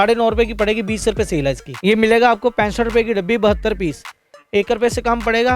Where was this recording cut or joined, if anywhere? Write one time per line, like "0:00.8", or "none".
0:01.7